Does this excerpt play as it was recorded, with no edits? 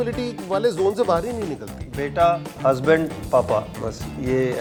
yes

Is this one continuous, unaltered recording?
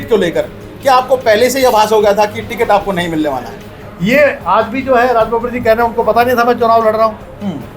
no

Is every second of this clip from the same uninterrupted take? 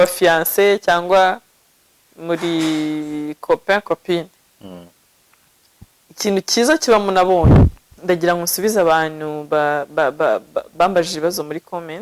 no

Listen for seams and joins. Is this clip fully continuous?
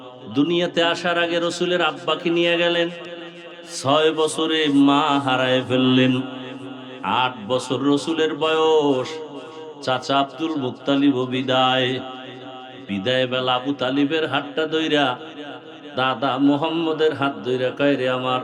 yes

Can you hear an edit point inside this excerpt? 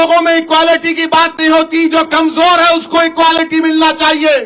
no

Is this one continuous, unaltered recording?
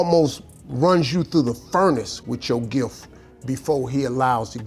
yes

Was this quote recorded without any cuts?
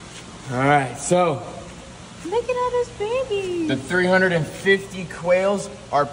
yes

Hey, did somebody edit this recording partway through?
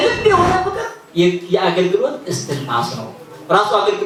no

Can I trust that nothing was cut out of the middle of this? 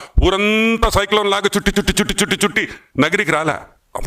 yes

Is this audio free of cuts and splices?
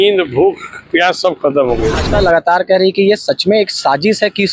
no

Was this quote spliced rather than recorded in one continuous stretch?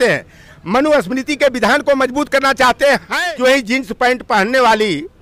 yes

